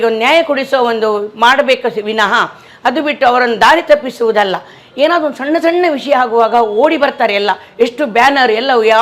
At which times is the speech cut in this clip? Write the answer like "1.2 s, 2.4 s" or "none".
4.8 s

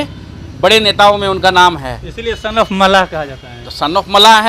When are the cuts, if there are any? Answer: none

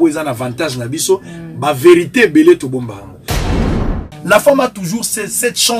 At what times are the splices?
3.6 s

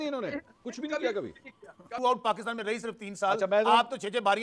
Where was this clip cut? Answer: 1.9 s

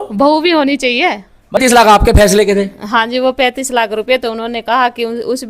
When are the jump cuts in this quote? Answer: 1.6 s

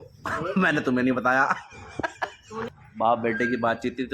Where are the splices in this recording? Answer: 2.7 s

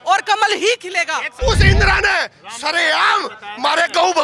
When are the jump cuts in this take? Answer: 1.3 s

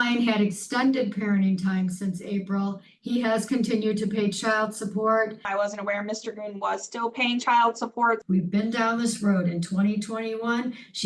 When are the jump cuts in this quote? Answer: 5.5 s, 8.2 s

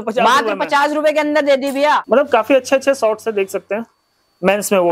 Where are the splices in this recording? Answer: 2.0 s

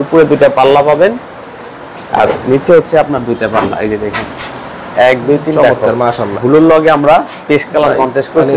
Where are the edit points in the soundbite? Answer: 6.3 s

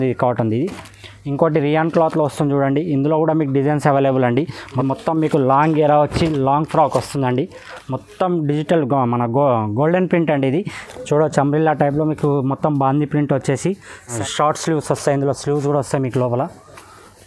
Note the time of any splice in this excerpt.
4.6 s, 10.8 s, 14.1 s

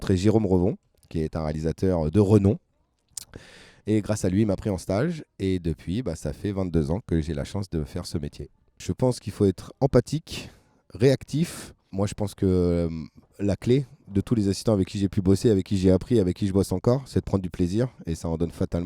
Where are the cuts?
8.8 s, 11.9 s

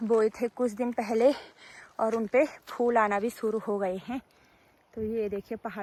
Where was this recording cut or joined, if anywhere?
none

